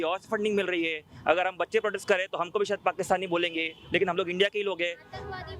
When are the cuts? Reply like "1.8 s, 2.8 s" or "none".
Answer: none